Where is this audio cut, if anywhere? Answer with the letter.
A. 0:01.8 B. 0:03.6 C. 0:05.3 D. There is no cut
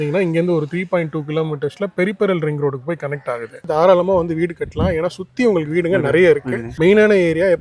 B